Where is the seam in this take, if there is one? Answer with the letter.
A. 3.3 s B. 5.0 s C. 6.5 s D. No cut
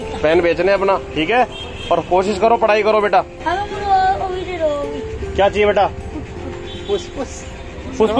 A